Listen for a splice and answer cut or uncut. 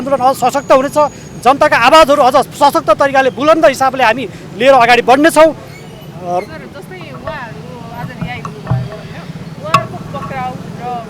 uncut